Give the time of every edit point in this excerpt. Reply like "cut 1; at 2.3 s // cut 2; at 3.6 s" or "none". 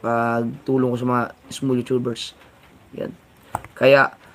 none